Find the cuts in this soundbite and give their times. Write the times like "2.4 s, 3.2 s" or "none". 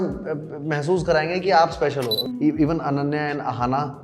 2.2 s